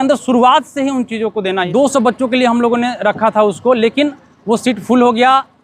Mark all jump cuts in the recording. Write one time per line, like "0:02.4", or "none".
0:01.6